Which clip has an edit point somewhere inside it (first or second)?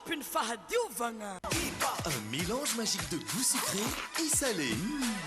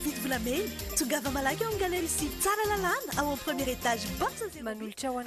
first